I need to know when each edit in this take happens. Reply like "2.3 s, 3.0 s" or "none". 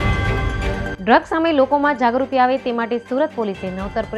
0.9 s

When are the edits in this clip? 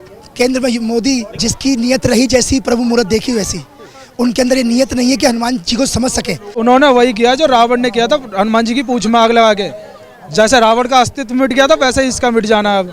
1.3 s, 6.5 s

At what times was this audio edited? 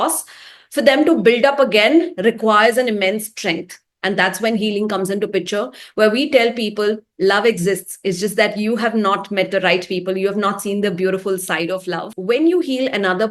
12.1 s

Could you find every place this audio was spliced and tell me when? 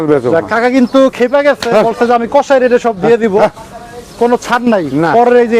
none

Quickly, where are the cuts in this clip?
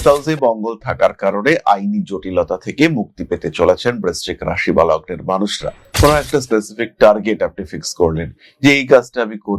5.8 s

